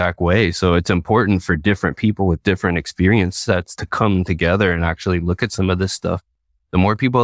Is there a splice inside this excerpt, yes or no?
no